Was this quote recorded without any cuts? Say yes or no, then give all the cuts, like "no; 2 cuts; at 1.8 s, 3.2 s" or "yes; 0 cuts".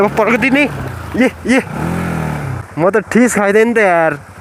yes; 0 cuts